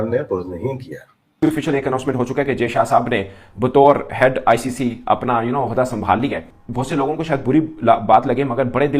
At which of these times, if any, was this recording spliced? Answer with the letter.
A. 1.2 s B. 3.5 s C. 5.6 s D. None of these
A